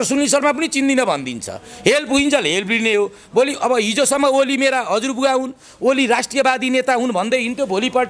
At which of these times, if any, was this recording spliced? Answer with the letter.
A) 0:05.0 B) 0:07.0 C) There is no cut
C